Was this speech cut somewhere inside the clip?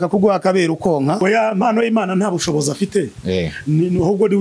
yes; 1 cut; at 1.2 s

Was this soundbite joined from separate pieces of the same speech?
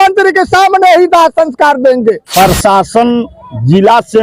yes; 1 cut; at 2.2 s

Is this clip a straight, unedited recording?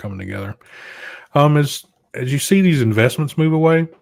yes; 0 cuts

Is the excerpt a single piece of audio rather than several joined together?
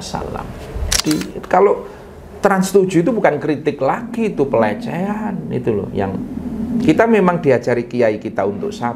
no; 1 cut; at 1.0 s

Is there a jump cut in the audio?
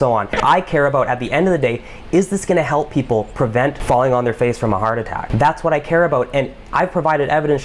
yes; 1 cut; at 5.2 s

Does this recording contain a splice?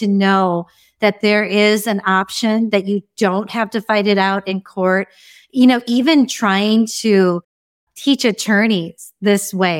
no; 0 cuts

